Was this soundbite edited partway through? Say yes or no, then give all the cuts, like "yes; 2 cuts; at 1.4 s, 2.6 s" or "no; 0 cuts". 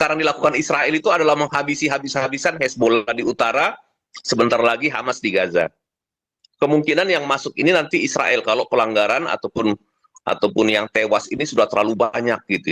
no; 0 cuts